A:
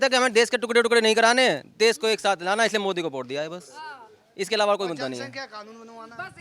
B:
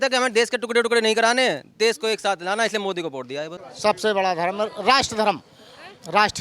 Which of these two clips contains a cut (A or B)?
B